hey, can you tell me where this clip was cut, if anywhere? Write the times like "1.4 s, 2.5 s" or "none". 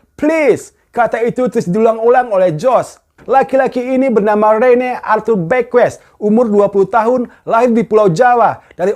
3.1 s